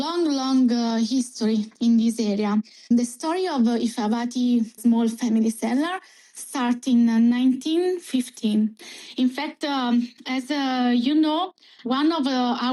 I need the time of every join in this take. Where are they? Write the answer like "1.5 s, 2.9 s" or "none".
none